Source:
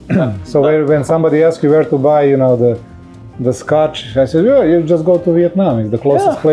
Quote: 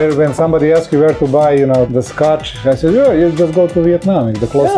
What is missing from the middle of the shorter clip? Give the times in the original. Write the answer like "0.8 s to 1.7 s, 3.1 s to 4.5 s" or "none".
2.6 s to 3.4 s